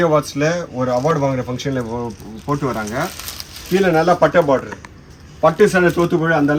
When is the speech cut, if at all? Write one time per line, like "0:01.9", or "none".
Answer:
none